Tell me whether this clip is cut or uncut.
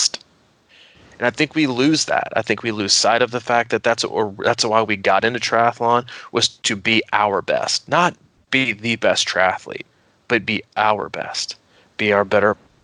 uncut